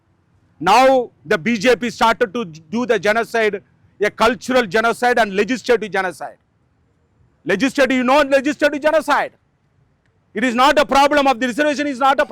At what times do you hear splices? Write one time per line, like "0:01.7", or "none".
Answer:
none